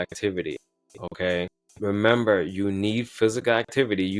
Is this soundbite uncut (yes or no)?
no